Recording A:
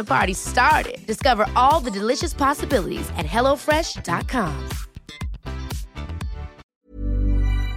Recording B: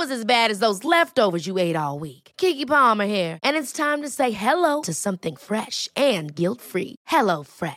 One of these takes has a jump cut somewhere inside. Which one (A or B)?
A